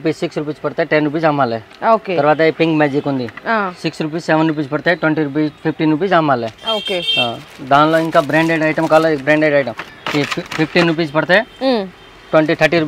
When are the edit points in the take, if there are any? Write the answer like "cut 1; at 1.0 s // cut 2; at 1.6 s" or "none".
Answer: none